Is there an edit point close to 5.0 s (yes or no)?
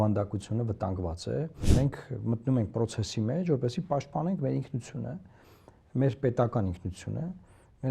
no